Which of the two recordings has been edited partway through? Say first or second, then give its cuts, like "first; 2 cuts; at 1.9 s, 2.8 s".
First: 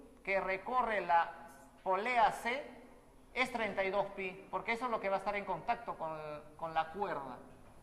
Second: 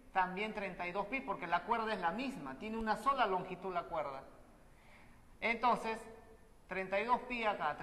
second; 1 cut; at 5.1 s